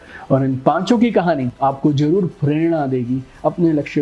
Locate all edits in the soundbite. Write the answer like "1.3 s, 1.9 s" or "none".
1.5 s